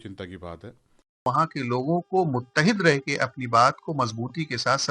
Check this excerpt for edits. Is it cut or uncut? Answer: cut